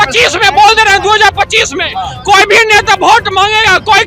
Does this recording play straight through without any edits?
yes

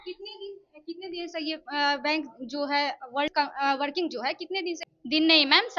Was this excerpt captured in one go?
no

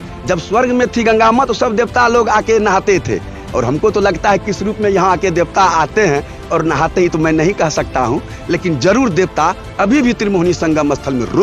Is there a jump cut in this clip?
no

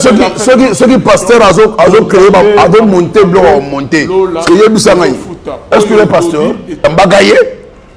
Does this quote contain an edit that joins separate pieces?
yes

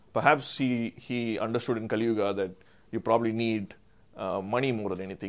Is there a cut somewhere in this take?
no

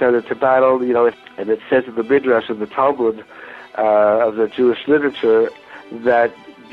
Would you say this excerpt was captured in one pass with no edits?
no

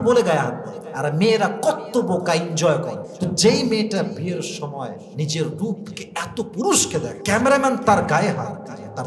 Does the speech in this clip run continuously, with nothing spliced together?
no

